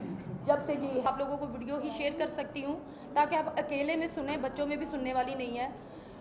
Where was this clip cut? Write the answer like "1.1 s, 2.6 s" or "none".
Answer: 1.1 s